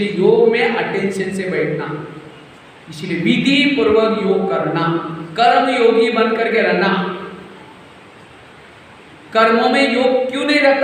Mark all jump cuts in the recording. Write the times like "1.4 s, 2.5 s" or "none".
none